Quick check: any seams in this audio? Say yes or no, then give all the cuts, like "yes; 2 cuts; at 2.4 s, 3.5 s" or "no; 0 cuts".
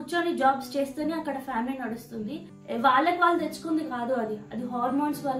yes; 1 cut; at 2.5 s